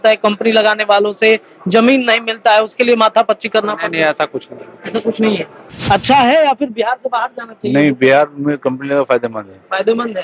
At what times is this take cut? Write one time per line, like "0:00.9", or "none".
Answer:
0:05.7